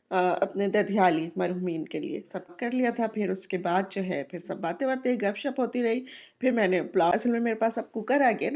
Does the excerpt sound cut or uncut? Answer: cut